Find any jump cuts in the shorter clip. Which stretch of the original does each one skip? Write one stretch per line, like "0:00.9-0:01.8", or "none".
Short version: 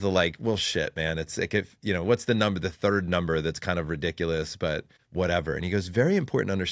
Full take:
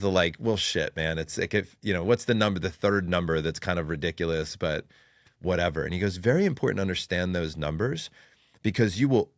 0:05.0-0:05.2